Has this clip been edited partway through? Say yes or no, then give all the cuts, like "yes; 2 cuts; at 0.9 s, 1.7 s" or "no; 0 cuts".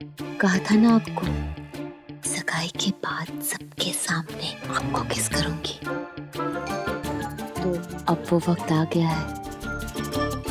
yes; 1 cut; at 7.0 s